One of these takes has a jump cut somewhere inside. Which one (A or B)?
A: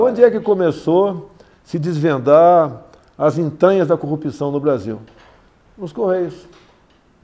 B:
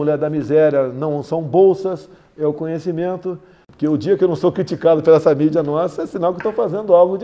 B